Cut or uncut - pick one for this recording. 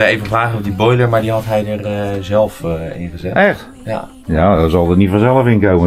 uncut